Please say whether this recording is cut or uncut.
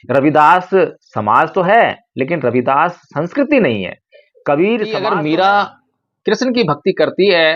cut